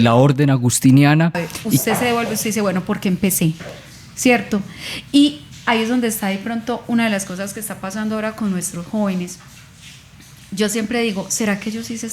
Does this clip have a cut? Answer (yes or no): yes